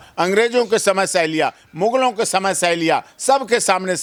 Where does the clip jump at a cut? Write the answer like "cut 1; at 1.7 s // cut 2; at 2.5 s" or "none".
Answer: none